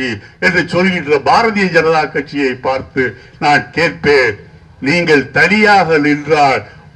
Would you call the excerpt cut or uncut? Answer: uncut